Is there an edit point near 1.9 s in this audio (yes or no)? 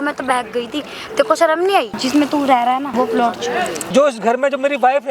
yes